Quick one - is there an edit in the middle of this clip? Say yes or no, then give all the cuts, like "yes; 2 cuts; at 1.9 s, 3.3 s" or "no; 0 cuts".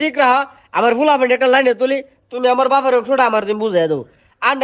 no; 0 cuts